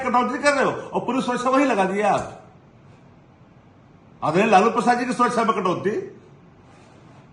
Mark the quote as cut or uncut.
uncut